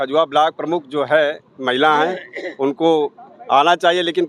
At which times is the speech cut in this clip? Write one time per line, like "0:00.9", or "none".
none